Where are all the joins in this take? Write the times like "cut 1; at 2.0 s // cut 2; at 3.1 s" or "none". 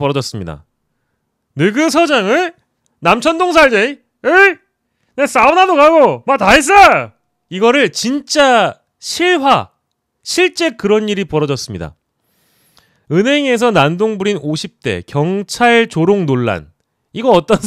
none